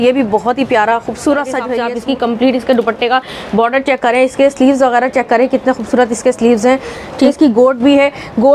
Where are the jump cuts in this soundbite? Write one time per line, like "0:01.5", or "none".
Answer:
0:01.8
0:07.3